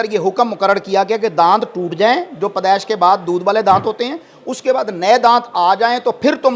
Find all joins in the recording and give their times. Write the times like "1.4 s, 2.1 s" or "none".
none